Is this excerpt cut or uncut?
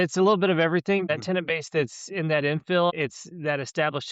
cut